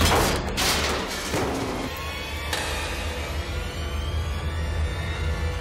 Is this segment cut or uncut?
cut